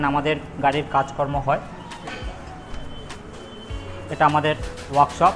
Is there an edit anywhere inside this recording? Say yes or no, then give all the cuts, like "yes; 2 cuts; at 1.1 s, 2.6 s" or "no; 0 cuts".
no; 0 cuts